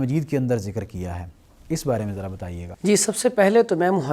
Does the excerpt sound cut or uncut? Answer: uncut